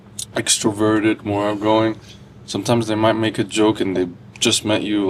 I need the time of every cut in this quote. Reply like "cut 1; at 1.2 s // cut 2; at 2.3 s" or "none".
none